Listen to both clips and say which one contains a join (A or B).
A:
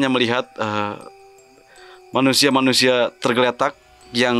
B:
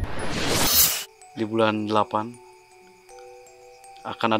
B